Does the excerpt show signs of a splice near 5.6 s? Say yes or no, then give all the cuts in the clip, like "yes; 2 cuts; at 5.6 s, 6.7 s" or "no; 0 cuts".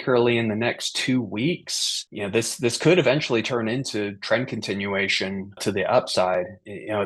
yes; 1 cut; at 5.6 s